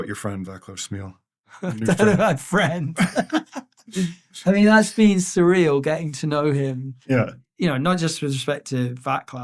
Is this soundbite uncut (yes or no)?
no